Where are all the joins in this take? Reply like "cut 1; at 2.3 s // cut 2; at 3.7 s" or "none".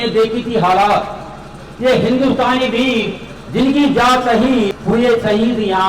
cut 1; at 4.8 s